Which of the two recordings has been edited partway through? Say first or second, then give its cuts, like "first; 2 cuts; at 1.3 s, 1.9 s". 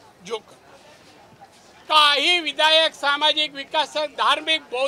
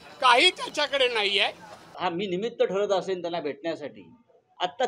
second; 1 cut; at 1.9 s